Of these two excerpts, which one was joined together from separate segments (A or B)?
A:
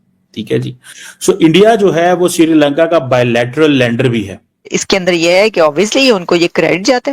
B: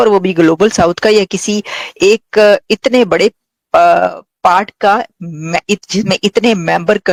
A